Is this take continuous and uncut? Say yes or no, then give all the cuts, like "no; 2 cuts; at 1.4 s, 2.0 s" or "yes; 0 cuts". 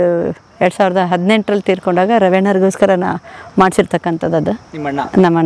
yes; 0 cuts